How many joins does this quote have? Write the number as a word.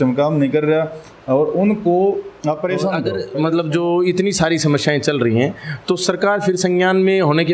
one